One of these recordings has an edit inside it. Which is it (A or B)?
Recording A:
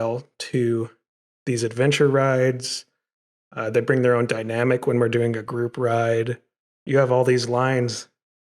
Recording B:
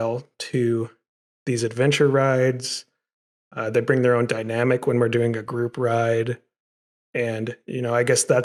A